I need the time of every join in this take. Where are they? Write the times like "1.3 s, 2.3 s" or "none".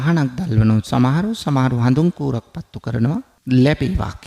3.3 s